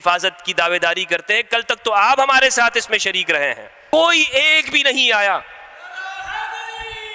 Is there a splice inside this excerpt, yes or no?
yes